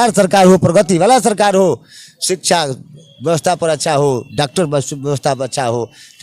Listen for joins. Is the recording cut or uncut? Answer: uncut